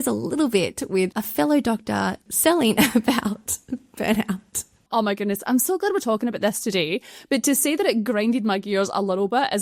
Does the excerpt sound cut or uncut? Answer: uncut